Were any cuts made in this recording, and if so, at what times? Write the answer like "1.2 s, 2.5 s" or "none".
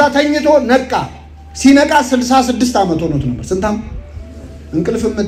none

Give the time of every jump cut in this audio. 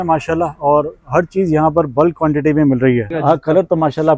3.1 s

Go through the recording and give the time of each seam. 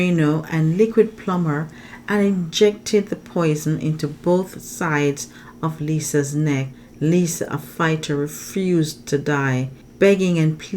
6.8 s, 9.8 s

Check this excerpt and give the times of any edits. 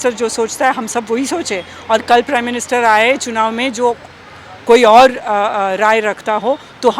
none

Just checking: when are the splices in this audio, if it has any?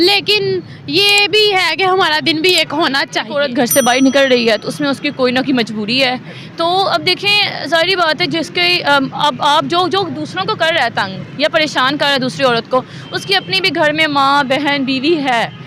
3.3 s

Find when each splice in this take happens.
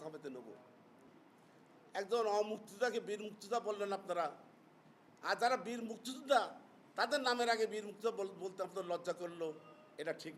1.2 s

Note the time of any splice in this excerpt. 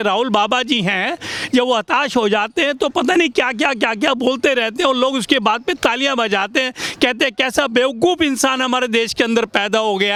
none

